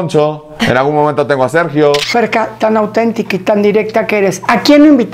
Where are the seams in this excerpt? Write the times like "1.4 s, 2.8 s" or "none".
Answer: 2.0 s